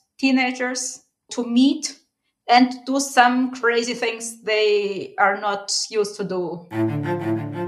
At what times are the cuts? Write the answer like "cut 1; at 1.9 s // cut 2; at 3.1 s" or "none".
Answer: cut 1; at 6.6 s